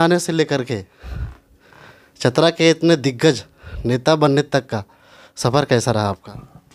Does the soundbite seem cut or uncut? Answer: uncut